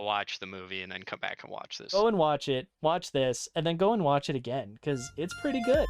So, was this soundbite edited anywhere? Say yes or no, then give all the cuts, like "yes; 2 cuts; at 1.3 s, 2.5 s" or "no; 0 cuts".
yes; 1 cut; at 1.8 s